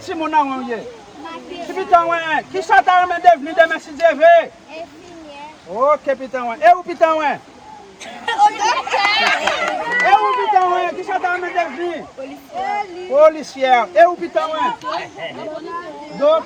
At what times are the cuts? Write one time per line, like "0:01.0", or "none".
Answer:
none